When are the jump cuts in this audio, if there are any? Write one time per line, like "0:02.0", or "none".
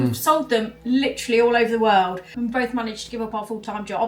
0:02.3